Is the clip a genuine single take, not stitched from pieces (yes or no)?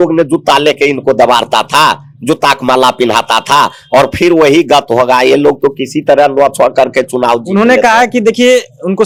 yes